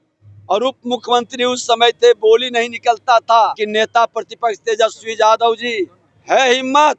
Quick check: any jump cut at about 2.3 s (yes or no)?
no